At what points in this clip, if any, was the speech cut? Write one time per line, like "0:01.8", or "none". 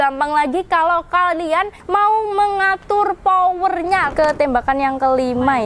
0:04.1